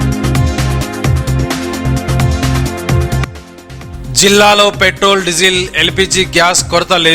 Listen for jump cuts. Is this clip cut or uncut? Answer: cut